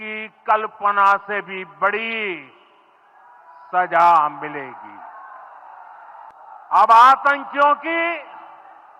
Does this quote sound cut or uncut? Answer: cut